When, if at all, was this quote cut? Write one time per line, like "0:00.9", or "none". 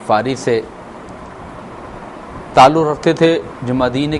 0:01.7